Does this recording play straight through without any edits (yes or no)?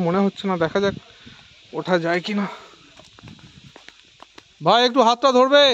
yes